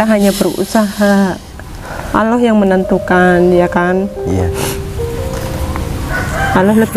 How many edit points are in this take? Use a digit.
0